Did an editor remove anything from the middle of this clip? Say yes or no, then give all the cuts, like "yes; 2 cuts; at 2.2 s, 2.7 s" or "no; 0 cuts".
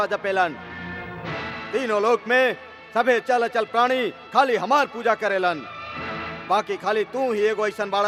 no; 0 cuts